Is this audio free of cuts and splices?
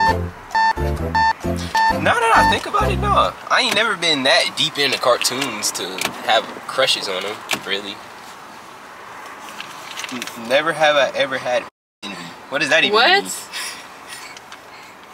no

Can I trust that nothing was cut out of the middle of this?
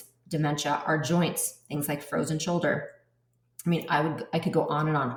yes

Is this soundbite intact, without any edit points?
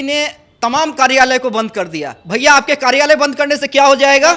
yes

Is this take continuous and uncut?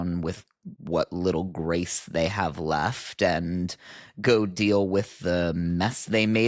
yes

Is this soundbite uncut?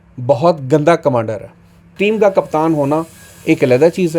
no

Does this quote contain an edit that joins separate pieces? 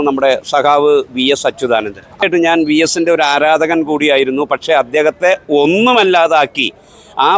yes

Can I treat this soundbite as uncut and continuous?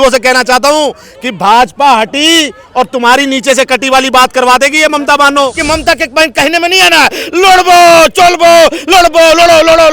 no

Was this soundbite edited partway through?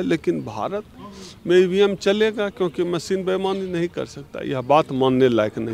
no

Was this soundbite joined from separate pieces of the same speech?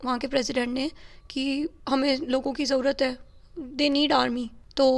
no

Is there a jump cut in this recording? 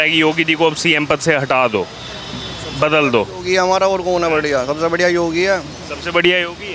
no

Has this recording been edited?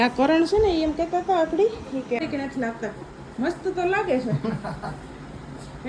yes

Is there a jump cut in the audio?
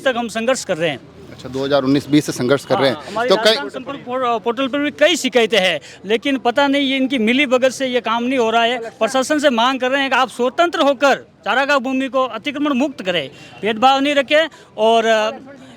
no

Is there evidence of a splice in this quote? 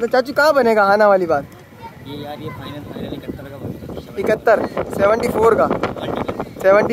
no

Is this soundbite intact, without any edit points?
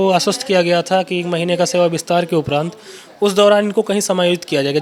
yes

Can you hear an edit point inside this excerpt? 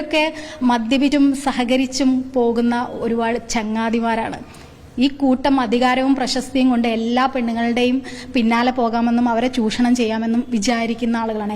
yes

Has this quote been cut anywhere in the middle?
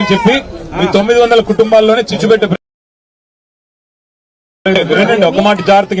no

